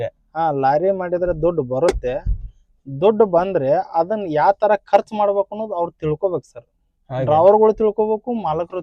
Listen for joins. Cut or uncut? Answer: uncut